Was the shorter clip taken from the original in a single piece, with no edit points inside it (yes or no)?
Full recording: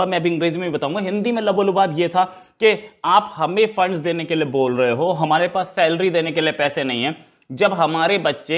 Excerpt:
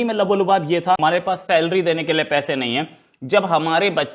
no